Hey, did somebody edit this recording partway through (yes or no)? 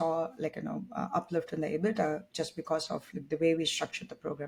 no